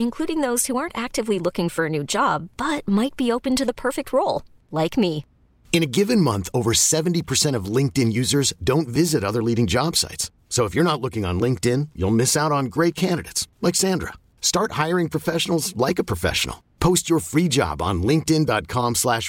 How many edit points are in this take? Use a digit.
0